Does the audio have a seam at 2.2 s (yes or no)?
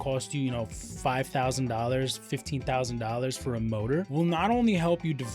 no